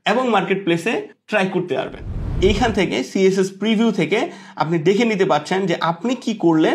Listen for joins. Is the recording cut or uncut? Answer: cut